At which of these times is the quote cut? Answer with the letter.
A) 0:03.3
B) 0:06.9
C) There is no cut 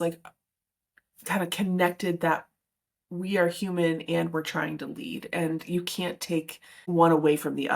B